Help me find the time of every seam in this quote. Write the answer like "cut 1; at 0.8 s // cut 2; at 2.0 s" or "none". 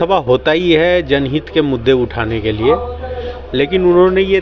none